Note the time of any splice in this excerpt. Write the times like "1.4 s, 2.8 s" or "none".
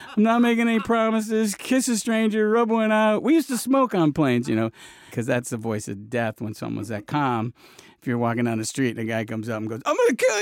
5.2 s